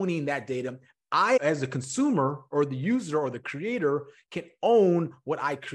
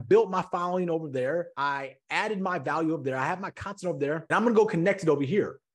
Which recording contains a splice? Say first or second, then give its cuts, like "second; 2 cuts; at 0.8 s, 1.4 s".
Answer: second; 2 cuts; at 1.5 s, 4.2 s